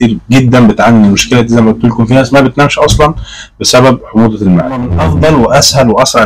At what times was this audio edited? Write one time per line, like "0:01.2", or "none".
0:04.9